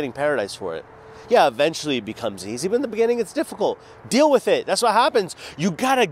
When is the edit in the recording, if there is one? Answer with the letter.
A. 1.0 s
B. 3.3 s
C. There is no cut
C